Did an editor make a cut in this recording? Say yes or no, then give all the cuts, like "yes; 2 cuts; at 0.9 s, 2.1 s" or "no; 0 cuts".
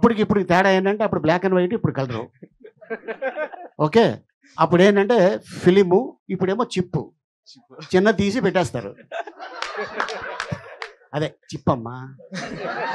no; 0 cuts